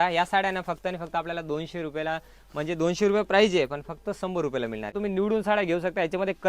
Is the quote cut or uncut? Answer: cut